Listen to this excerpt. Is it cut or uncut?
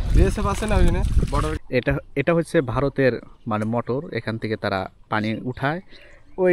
cut